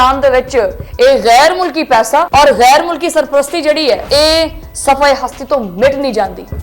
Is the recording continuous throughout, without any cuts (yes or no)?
no